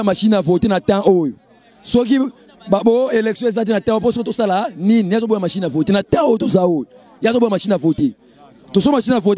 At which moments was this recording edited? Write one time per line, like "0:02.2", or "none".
none